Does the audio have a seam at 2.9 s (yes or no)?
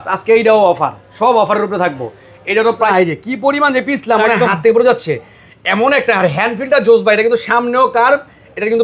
yes